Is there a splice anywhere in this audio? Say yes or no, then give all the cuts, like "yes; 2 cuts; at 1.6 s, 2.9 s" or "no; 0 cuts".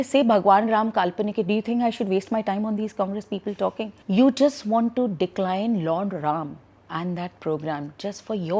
yes; 1 cut; at 4.0 s